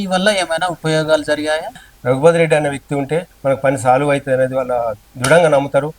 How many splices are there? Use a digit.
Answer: 2